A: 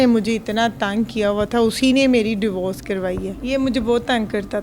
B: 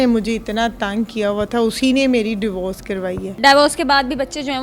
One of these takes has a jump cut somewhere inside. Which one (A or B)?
A